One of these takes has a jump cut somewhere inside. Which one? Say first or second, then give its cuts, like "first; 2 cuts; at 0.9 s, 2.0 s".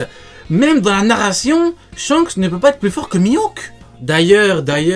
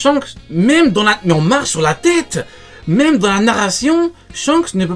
first; 1 cut; at 3.9 s